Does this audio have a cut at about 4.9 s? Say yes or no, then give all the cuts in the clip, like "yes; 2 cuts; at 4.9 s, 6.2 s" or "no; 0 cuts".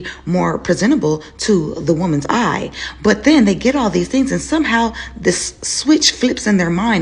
no; 1 cut; at 3.1 s